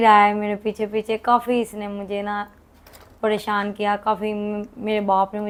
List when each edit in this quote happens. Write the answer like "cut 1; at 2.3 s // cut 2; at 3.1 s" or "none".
none